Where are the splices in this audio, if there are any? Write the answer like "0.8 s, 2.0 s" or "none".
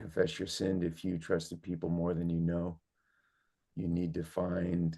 3.7 s